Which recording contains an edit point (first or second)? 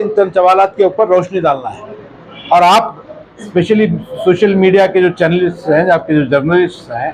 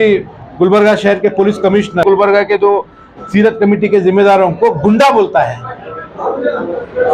second